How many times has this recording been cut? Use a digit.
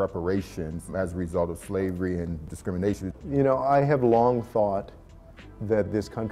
1